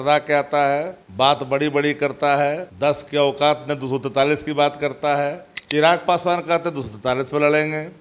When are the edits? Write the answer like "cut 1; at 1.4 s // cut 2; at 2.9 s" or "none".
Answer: cut 1; at 1.0 s // cut 2; at 2.7 s // cut 3; at 5.5 s